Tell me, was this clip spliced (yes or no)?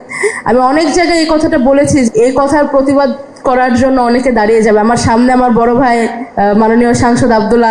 yes